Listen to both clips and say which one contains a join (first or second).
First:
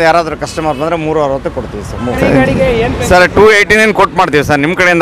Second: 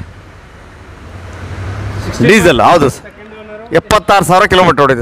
first